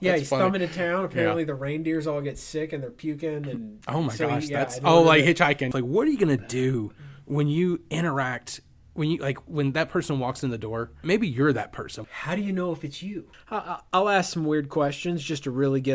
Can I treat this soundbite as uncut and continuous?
no; 4 cuts; at 5.7 s, 11.0 s, 12.0 s, 13.3 s

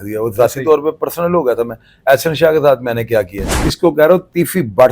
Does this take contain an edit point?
yes; 1 cut; at 3.7 s

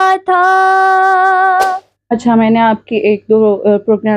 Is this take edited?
yes; 1 cut; at 1.9 s

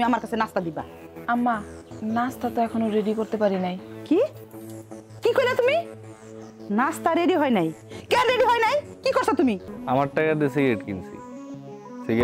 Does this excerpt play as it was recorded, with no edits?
no; 1 cut; at 9.7 s

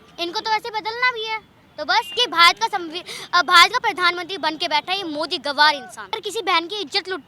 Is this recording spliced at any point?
yes; 2 cuts; at 2.2 s, 6.1 s

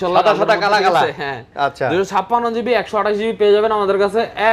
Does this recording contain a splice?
no; 0 cuts

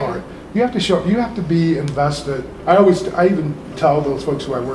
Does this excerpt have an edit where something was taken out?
yes; 1 cut; at 2.5 s

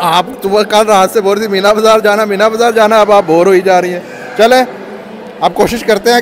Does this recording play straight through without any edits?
yes; 0 cuts

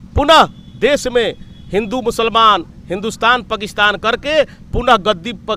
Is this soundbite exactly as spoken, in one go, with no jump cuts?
yes; 0 cuts

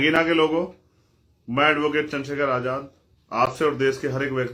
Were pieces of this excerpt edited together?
no; 0 cuts

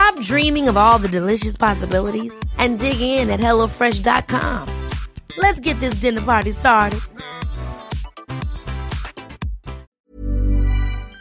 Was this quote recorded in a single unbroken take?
no; 1 cut; at 10.0 s

